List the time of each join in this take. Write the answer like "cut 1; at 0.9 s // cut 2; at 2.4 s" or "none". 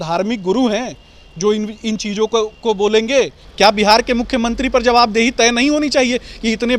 cut 1; at 3.4 s

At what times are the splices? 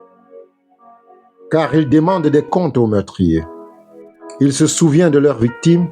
cut 1; at 1.5 s

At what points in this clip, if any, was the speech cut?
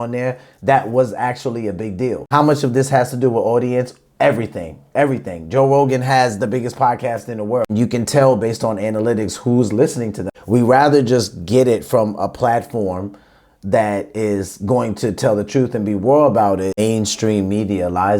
cut 1; at 2.3 s // cut 2; at 7.7 s // cut 3; at 10.3 s // cut 4; at 16.8 s

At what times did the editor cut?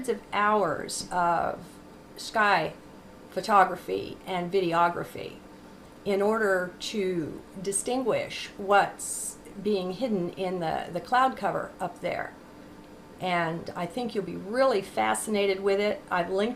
cut 1; at 7.7 s

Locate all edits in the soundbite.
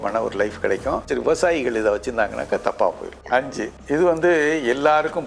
cut 1; at 1.1 s // cut 2; at 3.2 s

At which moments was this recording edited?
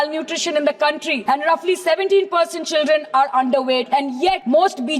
cut 1; at 1.1 s // cut 2; at 4.1 s

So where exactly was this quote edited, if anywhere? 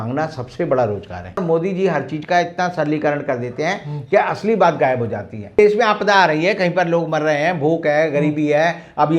cut 1; at 1.4 s // cut 2; at 5.6 s

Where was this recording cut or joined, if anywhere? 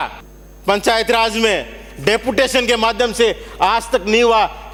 none

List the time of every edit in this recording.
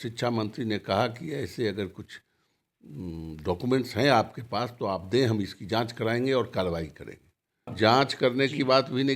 cut 1; at 7.6 s

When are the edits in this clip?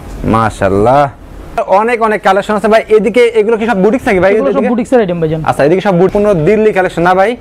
cut 1; at 1.6 s // cut 2; at 6.1 s

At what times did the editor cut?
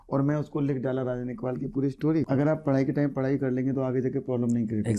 cut 1; at 2.3 s

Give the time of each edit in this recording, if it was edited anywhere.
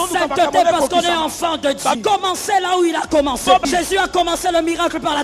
cut 1; at 2.0 s // cut 2; at 3.6 s

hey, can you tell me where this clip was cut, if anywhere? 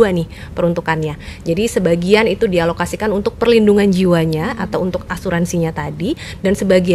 none

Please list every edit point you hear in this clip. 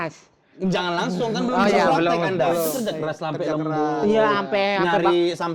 cut 1; at 2.7 s

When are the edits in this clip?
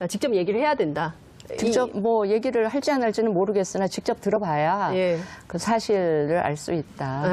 cut 1; at 3.2 s

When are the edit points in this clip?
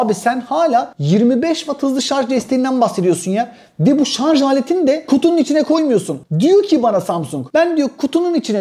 none

